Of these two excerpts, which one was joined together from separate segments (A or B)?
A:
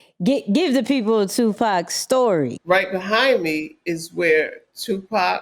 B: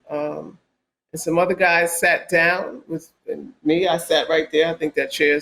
A